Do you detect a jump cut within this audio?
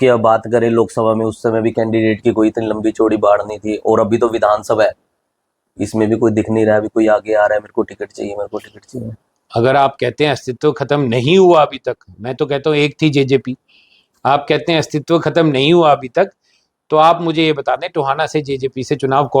no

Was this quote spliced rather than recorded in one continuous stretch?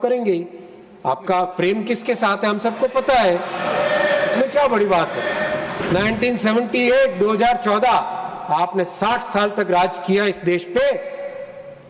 yes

